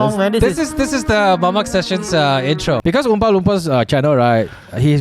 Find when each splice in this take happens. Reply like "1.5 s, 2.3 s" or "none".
2.8 s